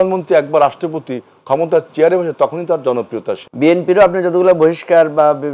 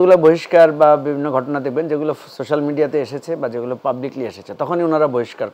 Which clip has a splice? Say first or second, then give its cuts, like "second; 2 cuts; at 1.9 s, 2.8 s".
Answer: first; 1 cut; at 3.4 s